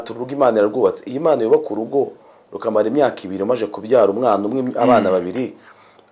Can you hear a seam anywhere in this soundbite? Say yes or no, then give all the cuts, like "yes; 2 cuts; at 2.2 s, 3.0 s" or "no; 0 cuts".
no; 0 cuts